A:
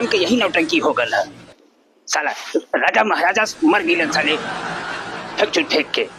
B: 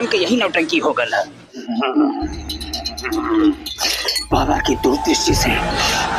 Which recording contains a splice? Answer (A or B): B